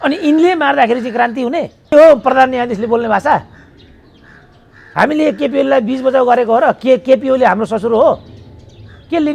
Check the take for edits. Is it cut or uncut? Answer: cut